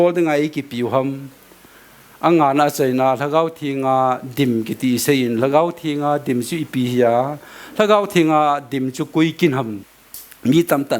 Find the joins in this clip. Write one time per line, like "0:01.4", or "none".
0:09.8